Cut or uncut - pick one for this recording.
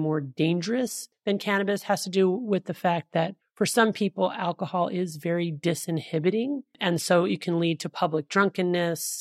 cut